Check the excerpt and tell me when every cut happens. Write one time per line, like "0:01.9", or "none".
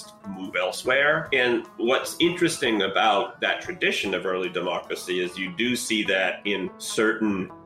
0:01.2